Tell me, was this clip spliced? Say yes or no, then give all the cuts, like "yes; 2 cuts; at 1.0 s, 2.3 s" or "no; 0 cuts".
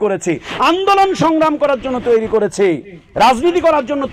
no; 0 cuts